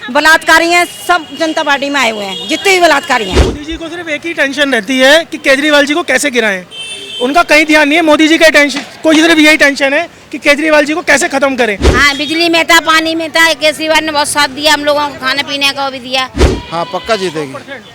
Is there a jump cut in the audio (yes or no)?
yes